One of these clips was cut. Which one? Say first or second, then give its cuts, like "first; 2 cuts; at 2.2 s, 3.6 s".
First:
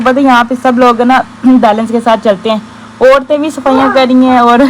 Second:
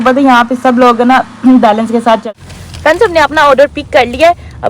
second; 1 cut; at 2.2 s